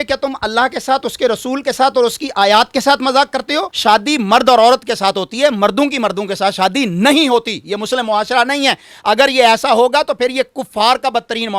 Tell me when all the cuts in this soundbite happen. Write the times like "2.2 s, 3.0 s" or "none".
none